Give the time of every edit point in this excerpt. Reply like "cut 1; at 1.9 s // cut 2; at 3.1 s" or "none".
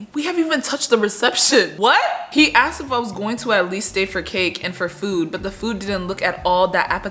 none